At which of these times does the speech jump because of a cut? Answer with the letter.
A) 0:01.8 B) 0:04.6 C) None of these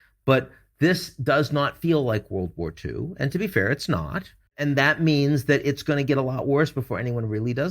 B